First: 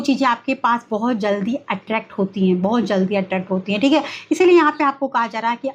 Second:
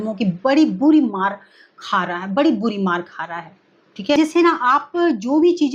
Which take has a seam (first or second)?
second